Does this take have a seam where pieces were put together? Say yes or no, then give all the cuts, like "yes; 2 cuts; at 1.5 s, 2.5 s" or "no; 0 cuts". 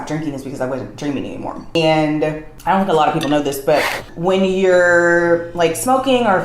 yes; 3 cuts; at 1.7 s, 2.5 s, 4.0 s